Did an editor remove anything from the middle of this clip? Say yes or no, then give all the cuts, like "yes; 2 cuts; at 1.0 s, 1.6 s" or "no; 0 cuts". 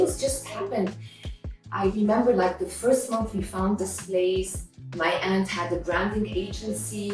no; 0 cuts